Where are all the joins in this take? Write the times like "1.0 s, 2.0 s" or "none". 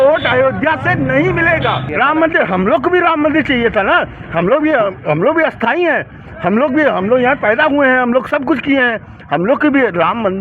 1.9 s